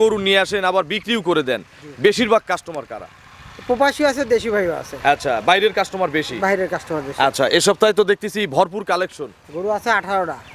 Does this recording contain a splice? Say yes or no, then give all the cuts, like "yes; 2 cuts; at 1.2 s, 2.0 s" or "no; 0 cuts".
no; 0 cuts